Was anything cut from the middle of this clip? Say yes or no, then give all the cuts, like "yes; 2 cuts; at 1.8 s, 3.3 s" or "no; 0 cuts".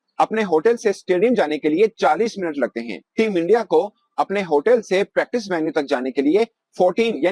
no; 0 cuts